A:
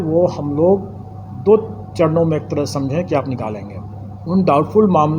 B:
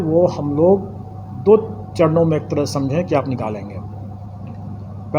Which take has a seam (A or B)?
A